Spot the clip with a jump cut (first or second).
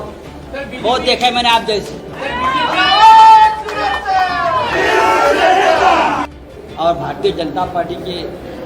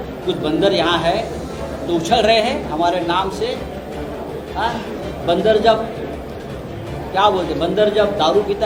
first